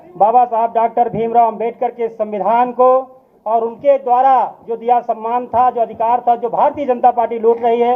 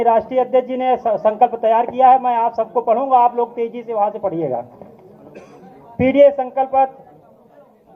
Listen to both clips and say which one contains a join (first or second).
second